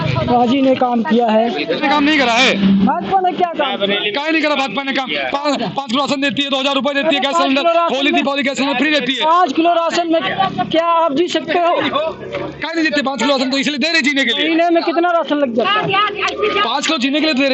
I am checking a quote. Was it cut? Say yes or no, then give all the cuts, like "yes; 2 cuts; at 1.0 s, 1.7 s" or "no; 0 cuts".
yes; 1 cut; at 1.8 s